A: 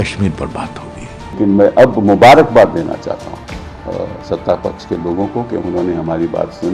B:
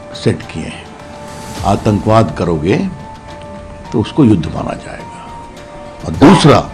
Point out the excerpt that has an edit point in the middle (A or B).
A